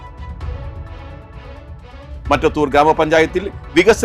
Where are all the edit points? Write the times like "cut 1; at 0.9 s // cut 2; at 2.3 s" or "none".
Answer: cut 1; at 1.4 s // cut 2; at 2.2 s